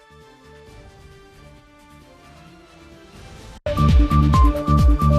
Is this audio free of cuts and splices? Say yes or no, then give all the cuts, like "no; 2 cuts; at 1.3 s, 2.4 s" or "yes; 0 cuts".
no; 1 cut; at 3.6 s